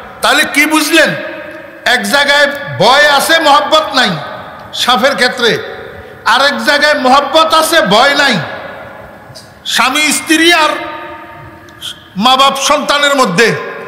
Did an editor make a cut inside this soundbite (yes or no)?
no